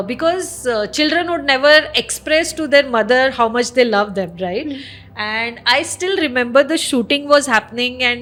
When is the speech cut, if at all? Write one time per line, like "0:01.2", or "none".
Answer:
none